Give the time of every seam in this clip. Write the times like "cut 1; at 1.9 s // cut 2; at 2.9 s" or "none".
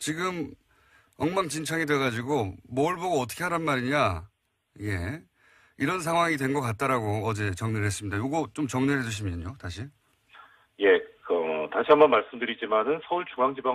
none